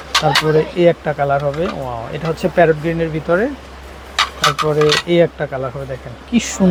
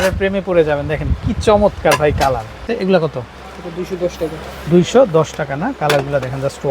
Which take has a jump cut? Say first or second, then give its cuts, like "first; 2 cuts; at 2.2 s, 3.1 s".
second; 1 cut; at 2.8 s